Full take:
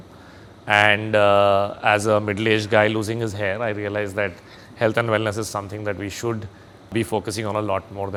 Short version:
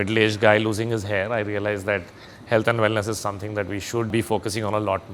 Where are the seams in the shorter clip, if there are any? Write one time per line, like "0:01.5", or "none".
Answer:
0:04.1